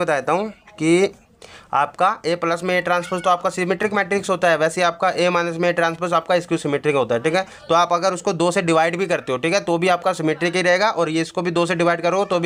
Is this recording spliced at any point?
no; 0 cuts

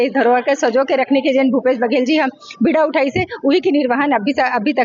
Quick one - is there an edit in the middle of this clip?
no; 0 cuts

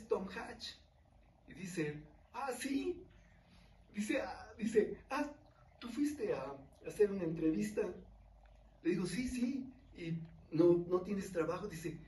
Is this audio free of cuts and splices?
yes; 0 cuts

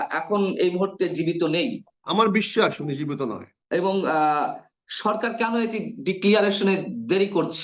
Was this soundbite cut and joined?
yes; 2 cuts; at 1.9 s, 3.5 s

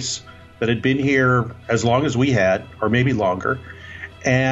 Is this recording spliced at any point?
no; 0 cuts

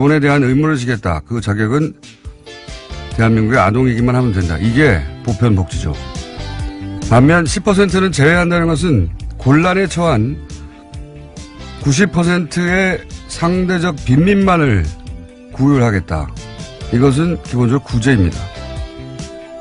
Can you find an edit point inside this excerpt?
yes; 1 cut; at 1.6 s

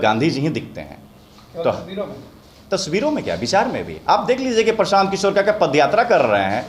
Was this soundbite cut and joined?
no; 0 cuts

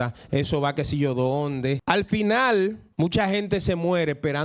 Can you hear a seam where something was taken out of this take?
yes; 2 cuts; at 1.8 s, 2.8 s

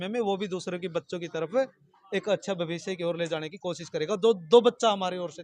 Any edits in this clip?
no; 0 cuts

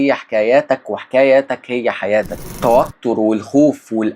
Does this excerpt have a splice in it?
yes; 1 cut; at 2.4 s

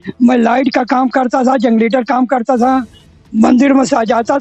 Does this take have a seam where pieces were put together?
no; 0 cuts

